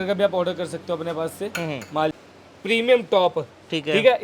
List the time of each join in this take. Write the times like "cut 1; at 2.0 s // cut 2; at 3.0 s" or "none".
cut 1; at 2.2 s